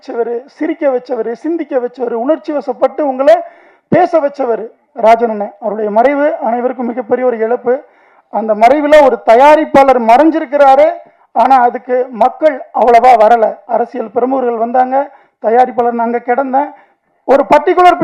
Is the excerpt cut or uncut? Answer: uncut